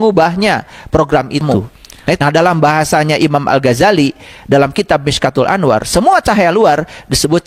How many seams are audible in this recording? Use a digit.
1